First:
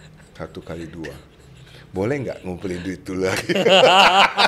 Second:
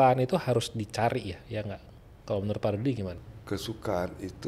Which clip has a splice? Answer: second; 1 cut; at 3.2 s

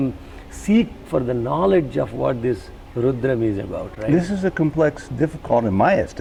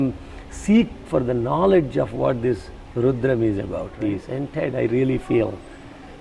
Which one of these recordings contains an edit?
second; 1 cut; at 3.9 s

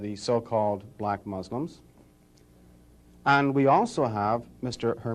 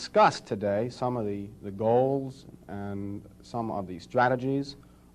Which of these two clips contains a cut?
second; 1 cut; at 1.1 s

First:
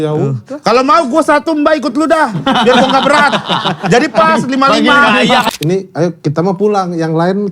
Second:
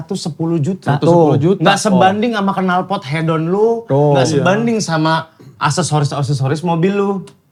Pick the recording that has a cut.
first; 1 cut; at 5.5 s

